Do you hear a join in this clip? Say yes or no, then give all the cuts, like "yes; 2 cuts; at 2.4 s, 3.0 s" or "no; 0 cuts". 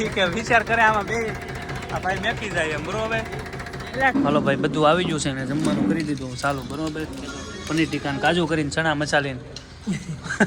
yes; 1 cut; at 4.1 s